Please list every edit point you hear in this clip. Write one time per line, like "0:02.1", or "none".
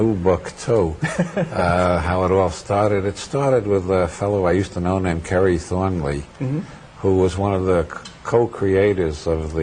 none